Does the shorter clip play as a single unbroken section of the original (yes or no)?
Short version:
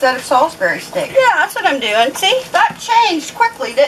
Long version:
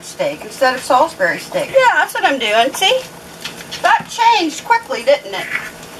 no